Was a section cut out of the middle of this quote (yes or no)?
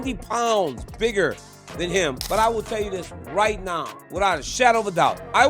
yes